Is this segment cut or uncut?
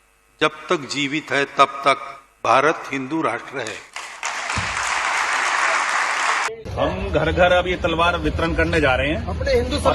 cut